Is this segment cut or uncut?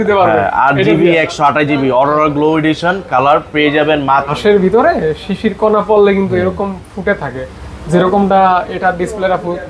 cut